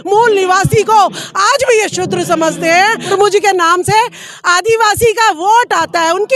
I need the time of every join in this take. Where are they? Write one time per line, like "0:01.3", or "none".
0:03.1